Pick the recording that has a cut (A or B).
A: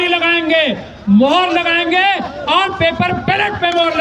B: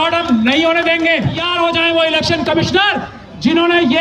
B